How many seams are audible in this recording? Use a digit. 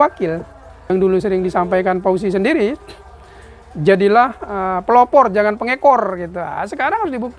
1